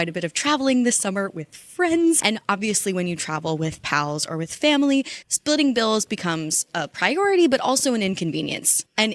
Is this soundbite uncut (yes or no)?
no